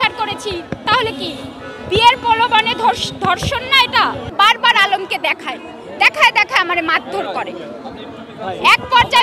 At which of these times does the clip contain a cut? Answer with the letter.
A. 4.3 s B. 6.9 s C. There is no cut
A